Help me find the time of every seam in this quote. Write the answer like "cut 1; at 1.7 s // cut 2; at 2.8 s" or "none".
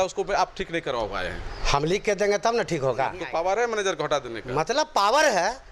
cut 1; at 3.2 s